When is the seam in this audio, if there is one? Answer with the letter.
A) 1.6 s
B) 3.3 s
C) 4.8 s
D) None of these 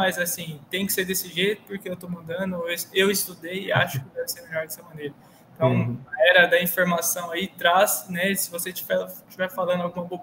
D